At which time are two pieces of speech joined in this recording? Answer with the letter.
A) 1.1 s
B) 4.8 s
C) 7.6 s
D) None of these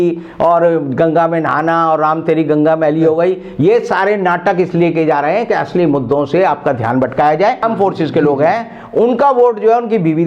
C